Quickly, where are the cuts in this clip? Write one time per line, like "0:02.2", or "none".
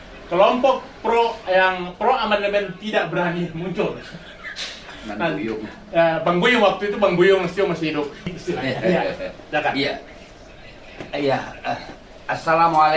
0:08.3